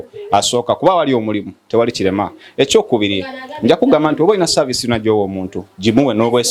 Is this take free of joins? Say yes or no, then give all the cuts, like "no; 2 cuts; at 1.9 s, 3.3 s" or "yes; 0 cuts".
yes; 0 cuts